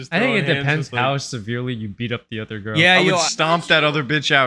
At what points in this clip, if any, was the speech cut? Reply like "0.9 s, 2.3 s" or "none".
3.3 s